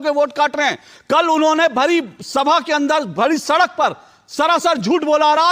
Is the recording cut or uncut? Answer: uncut